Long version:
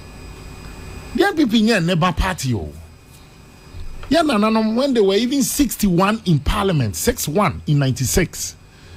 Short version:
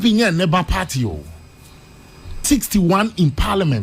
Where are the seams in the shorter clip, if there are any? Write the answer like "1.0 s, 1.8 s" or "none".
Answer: 2.4 s